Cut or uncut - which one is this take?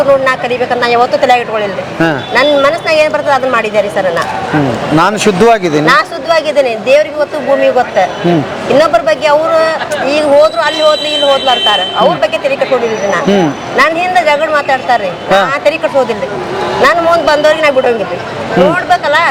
uncut